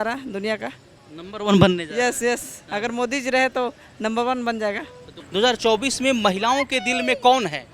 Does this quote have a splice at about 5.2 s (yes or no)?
yes